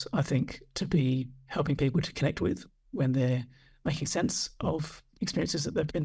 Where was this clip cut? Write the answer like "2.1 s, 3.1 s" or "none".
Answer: 1.4 s, 2.8 s, 5.0 s